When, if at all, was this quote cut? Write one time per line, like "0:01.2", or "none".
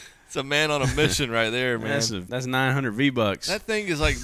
0:02.2

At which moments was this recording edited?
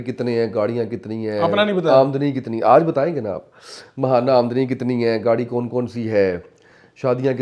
none

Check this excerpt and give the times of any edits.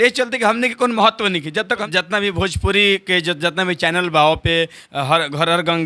0:01.8

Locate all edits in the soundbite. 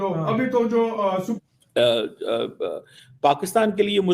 0:01.3

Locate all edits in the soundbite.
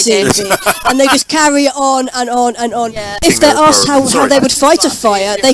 0:03.2

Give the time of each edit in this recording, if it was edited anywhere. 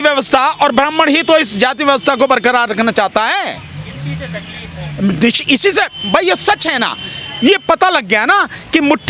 none

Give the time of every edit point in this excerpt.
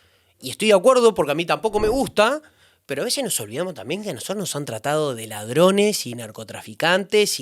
none

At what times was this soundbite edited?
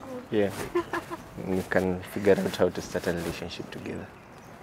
none

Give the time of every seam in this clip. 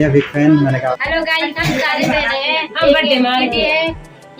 0:01.0

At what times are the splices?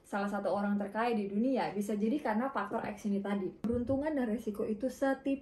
0:03.7

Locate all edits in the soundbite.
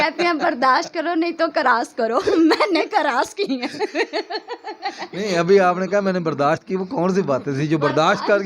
none

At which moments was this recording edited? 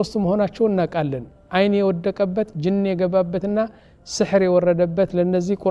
none

